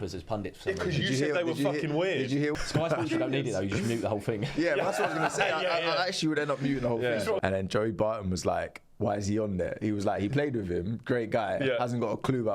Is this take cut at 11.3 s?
no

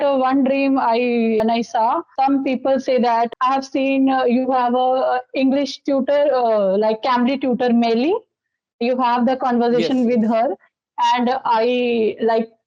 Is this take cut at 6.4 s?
no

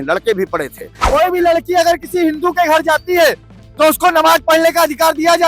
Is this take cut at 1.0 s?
yes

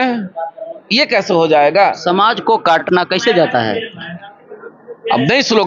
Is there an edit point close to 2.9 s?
yes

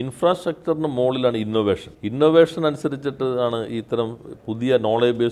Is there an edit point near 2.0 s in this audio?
yes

